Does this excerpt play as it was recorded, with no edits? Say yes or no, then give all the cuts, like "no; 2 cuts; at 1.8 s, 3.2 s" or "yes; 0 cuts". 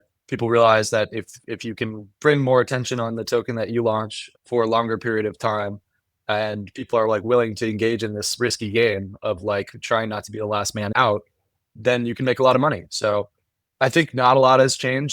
no; 1 cut; at 10.9 s